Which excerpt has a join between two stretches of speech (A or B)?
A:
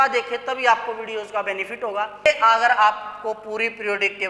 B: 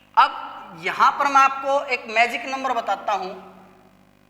A